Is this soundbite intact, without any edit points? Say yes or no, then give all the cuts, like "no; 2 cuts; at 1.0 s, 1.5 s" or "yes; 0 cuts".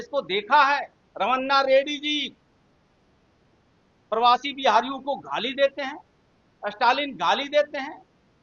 no; 1 cut; at 1.0 s